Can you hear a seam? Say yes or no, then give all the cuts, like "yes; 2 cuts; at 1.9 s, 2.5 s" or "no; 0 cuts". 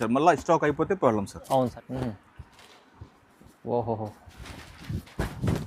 yes; 1 cut; at 1.7 s